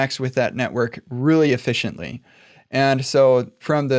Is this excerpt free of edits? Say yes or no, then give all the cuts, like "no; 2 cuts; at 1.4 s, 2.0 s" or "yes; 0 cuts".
yes; 0 cuts